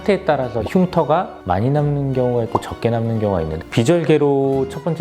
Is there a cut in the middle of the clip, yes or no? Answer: yes